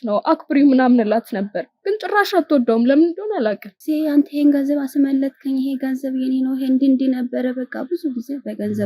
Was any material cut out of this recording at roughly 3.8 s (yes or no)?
yes